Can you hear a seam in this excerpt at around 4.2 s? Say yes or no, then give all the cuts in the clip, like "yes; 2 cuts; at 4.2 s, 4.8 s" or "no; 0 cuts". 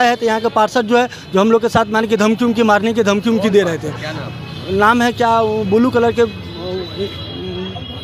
no; 0 cuts